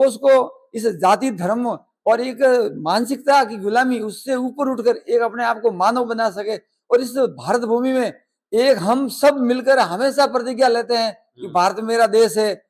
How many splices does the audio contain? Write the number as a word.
zero